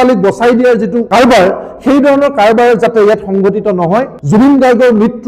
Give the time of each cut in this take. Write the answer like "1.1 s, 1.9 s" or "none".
1.0 s, 4.2 s

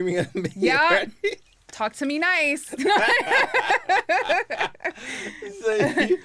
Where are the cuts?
none

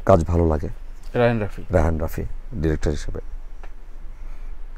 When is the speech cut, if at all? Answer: none

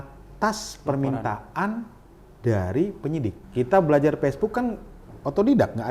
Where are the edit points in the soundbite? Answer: 3.4 s

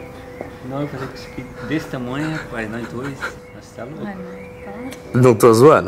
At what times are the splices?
3.3 s

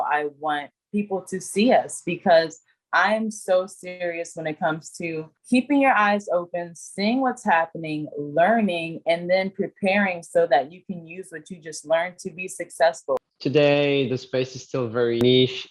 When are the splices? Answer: 13.2 s

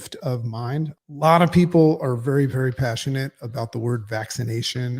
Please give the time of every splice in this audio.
0.9 s

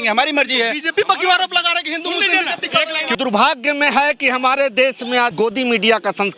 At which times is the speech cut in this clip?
3.2 s, 5.3 s

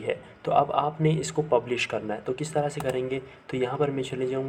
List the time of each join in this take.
none

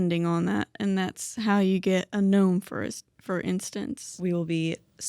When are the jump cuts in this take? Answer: 4.1 s

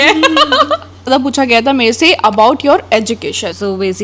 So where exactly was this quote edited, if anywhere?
1.1 s

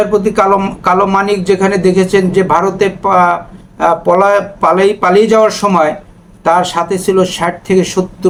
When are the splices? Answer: none

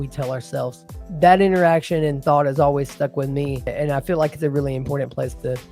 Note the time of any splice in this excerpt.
1.0 s, 3.7 s

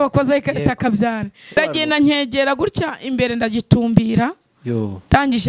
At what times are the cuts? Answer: 1.5 s

